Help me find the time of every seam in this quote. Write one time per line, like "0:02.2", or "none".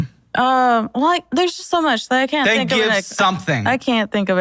0:01.4
0:02.5